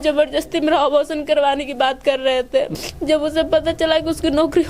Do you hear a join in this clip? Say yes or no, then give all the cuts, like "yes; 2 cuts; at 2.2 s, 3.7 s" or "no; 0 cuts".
yes; 1 cut; at 2.7 s